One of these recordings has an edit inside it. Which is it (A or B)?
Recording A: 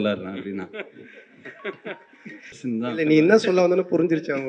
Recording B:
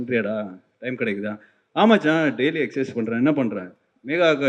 A